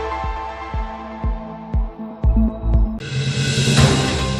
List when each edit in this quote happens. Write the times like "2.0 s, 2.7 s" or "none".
3.1 s